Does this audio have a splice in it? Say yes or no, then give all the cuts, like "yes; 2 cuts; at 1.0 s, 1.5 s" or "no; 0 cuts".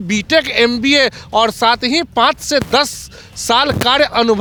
no; 0 cuts